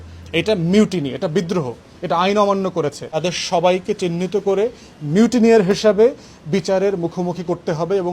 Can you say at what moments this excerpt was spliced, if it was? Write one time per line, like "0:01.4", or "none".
0:03.1